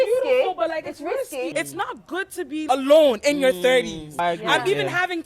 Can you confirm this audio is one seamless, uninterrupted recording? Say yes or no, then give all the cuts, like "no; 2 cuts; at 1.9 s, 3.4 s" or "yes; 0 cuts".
no; 3 cuts; at 1.5 s, 2.7 s, 4.1 s